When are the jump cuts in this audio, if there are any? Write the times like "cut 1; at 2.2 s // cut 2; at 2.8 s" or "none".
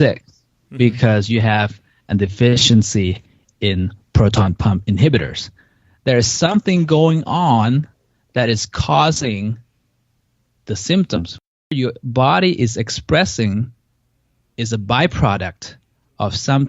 cut 1; at 11.6 s